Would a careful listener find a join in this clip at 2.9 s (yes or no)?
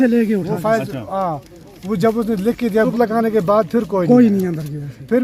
yes